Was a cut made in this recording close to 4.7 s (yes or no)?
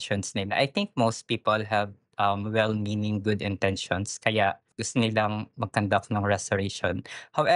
yes